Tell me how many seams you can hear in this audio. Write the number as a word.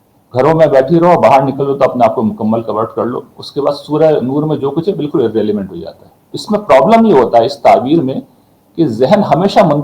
one